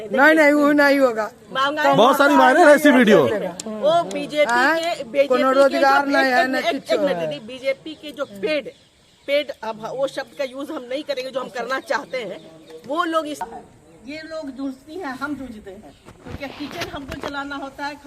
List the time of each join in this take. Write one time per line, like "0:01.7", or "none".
0:13.4